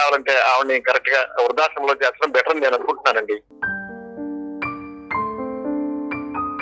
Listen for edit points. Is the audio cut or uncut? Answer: cut